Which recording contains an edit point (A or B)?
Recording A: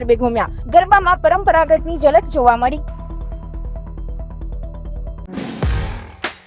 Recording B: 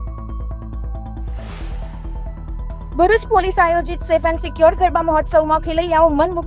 A